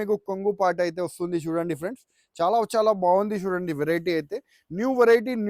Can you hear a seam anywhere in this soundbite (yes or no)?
no